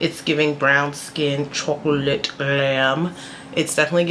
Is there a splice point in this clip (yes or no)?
no